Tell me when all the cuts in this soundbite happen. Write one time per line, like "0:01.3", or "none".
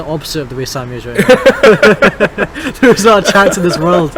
none